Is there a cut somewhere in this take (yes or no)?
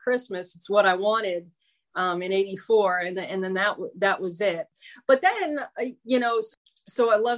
yes